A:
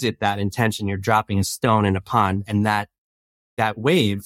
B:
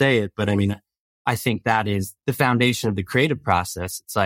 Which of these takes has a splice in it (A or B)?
B